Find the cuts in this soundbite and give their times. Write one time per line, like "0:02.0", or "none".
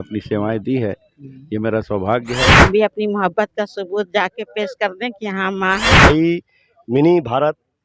0:02.7
0:06.1